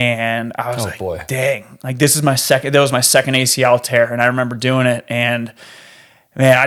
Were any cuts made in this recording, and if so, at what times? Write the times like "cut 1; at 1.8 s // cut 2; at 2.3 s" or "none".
none